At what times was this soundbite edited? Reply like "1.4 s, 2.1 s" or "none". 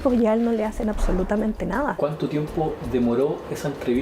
2.0 s